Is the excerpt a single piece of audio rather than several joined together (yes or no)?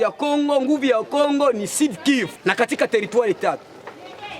no